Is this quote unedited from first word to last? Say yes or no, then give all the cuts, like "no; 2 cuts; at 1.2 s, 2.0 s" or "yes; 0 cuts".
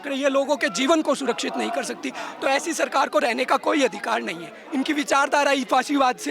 no; 1 cut; at 4.6 s